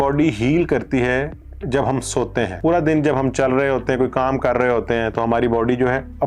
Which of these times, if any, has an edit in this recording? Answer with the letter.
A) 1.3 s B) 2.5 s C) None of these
B